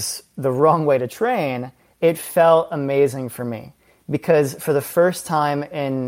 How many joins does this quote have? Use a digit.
0